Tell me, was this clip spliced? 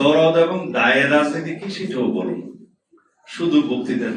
no; 0 cuts

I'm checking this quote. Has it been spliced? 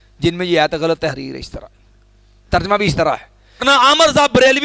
yes; 1 cut; at 3.6 s

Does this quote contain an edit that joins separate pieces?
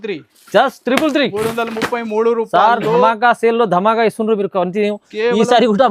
no; 0 cuts

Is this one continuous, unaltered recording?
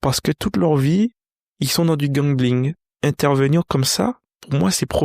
no; 1 cut; at 2.8 s

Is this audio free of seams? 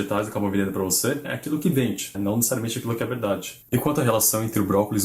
no; 1 cut; at 3.7 s

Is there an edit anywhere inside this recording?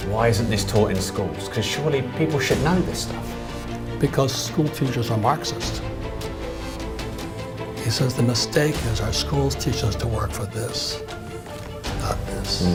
no; 0 cuts

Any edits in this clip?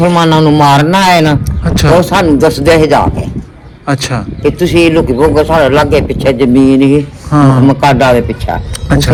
no; 0 cuts

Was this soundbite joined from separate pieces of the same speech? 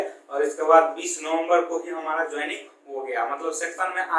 no; 0 cuts

